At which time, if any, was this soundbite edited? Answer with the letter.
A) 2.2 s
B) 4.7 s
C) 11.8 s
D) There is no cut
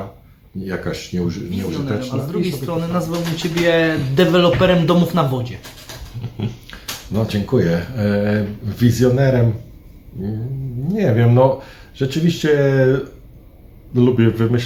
A